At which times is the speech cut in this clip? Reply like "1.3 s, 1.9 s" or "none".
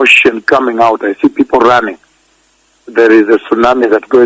2.5 s